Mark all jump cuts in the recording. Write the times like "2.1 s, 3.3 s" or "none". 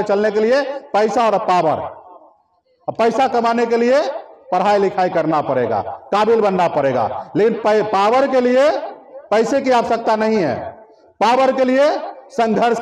none